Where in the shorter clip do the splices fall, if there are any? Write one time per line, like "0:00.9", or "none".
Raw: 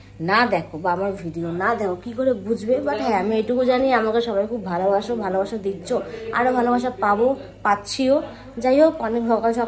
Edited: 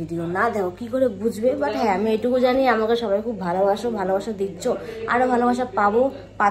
none

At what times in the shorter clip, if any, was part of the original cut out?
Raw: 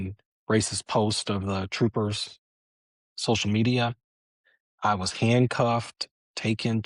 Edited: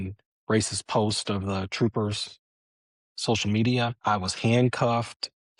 0:04.0

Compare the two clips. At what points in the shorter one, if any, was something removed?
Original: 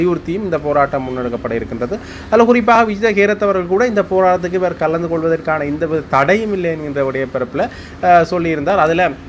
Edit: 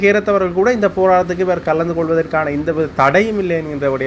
none

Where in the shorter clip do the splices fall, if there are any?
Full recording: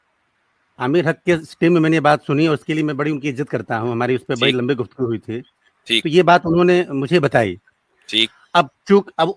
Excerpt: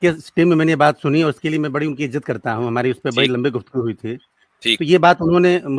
none

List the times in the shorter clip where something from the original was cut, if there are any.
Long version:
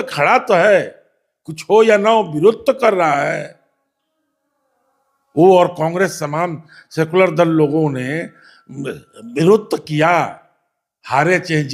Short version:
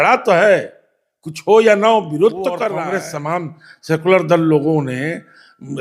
0:02.8

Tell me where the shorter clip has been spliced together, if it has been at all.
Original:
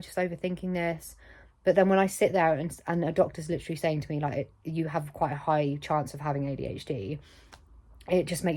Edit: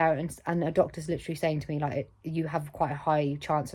none

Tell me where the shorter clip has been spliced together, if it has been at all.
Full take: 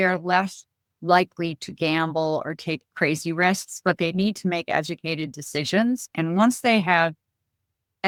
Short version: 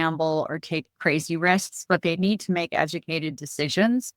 none

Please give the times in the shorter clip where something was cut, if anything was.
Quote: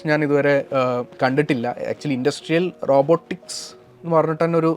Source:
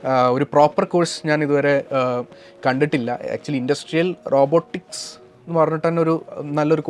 0:01.1

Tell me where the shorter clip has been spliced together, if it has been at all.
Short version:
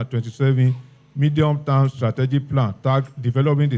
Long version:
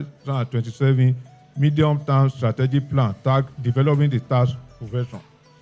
none

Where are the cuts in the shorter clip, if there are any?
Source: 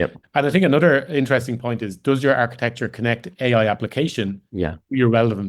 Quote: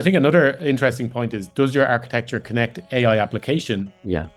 none

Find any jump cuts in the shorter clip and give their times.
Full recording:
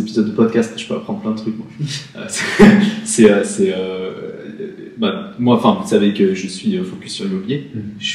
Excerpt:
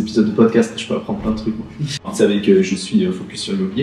0:02.1

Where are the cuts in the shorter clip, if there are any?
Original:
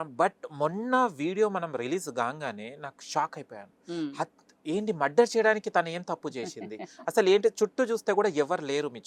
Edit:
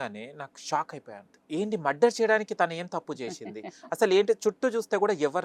0:01.3

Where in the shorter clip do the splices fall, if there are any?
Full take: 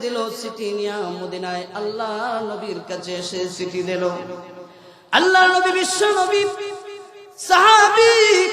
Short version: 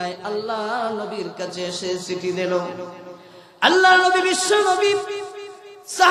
none

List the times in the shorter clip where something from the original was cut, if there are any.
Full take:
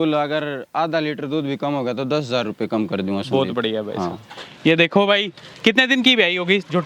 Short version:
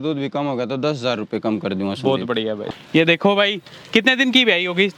0:02.7

